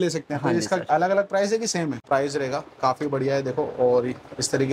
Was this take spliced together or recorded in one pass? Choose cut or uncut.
cut